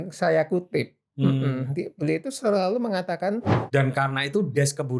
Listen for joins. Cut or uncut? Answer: cut